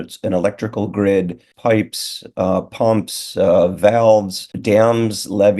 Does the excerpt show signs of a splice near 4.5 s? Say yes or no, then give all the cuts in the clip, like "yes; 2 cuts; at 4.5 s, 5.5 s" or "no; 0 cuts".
yes; 2 cuts; at 1.5 s, 4.5 s